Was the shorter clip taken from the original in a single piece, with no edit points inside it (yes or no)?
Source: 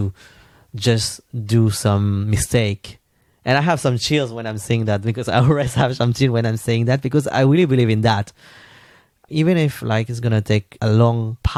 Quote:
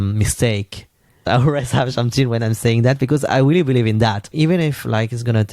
no